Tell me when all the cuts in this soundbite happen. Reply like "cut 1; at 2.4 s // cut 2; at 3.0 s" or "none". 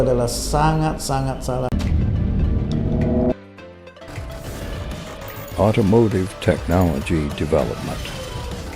cut 1; at 1.7 s